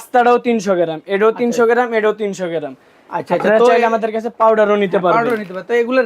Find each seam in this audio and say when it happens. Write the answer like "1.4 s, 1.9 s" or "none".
none